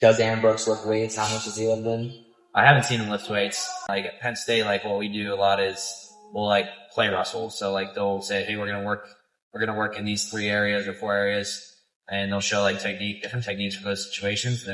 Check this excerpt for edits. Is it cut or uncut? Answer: cut